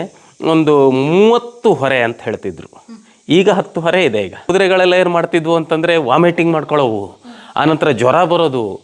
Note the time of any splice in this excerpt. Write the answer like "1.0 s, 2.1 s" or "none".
4.4 s